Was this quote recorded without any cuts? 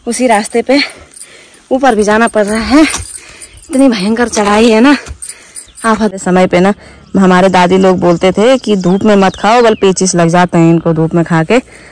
no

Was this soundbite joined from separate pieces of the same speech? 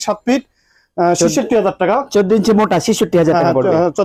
no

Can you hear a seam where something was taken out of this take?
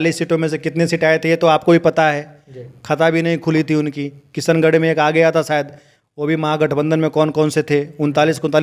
no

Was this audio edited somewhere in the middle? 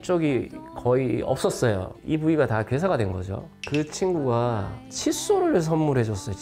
yes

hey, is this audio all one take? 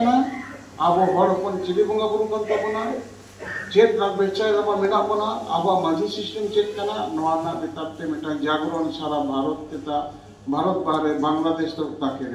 yes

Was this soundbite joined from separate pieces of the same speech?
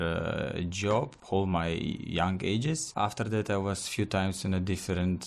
yes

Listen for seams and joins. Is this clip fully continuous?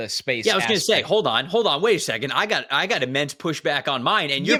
yes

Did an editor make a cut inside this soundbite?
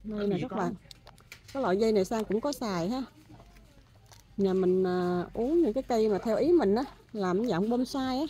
no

